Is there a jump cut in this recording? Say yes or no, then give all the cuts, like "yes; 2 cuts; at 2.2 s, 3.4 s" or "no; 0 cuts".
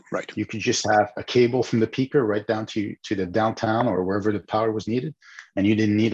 no; 0 cuts